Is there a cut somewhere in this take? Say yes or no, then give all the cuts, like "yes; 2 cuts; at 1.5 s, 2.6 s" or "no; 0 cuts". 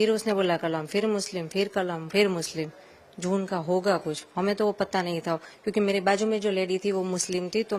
no; 0 cuts